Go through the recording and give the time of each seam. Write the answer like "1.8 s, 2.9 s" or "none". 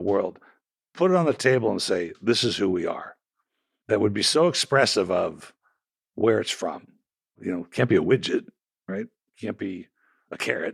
3.4 s, 7.4 s